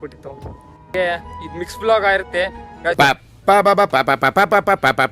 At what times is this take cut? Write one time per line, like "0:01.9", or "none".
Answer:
0:00.9